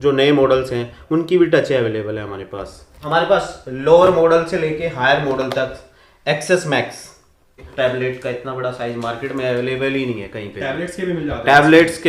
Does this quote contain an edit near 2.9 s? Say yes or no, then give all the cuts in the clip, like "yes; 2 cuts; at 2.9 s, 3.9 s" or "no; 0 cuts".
yes; 2 cuts; at 2.9 s, 7.6 s